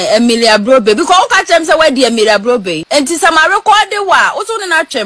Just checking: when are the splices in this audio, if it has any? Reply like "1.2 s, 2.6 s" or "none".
2.8 s